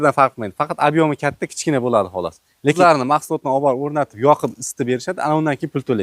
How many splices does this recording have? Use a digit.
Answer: 1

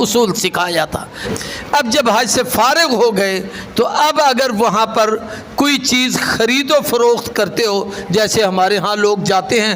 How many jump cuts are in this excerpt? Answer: 1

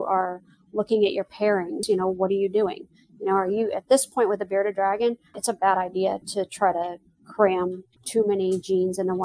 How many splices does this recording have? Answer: 4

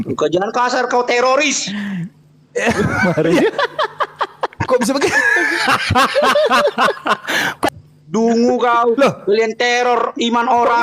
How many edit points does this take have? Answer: 1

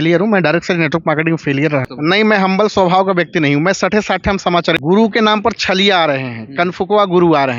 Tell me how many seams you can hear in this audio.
2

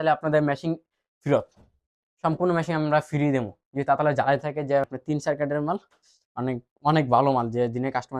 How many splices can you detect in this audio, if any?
1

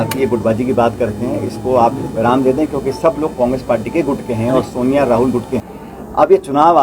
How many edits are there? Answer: 1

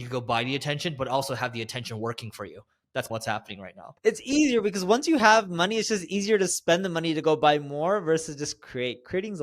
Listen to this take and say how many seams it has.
1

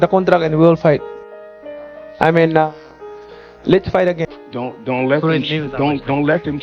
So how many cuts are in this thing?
1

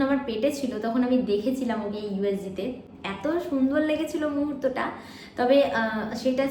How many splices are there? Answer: 0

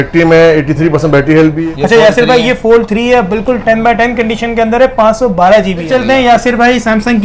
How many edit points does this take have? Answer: 2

